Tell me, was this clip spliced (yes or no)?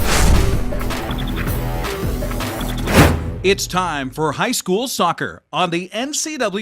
yes